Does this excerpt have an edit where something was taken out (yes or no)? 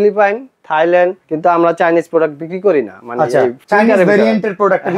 no